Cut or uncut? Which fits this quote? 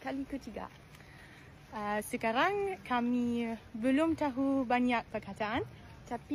uncut